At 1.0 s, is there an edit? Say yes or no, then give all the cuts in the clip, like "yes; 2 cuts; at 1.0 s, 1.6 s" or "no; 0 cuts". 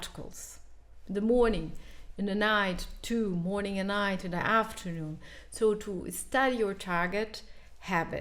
no; 0 cuts